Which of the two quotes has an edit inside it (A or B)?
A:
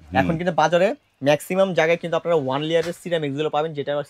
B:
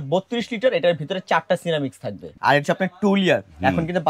B